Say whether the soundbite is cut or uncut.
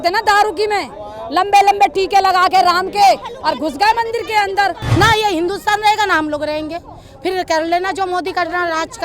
cut